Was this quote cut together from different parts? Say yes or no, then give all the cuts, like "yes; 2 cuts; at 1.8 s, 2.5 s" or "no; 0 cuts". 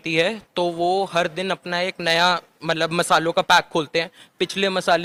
no; 0 cuts